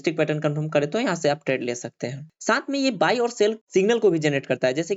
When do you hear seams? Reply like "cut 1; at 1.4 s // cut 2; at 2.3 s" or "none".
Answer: cut 1; at 2.3 s